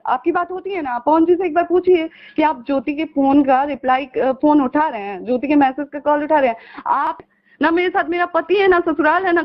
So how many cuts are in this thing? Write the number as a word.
one